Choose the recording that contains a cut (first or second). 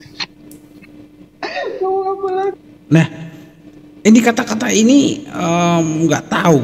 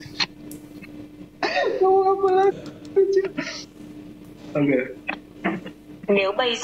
second